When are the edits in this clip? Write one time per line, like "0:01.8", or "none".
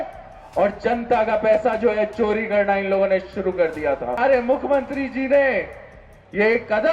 0:04.2